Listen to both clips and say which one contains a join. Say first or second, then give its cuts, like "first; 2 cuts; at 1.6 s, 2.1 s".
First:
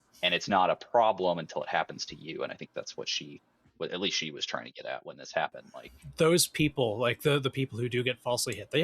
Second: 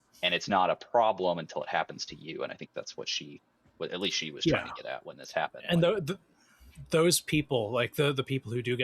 first; 1 cut; at 5.6 s